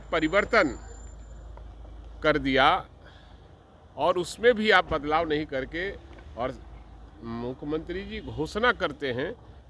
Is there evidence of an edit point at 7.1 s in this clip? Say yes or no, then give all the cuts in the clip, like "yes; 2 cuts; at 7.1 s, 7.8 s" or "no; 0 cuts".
no; 0 cuts